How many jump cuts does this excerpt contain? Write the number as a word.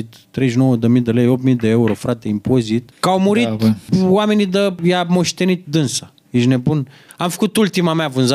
five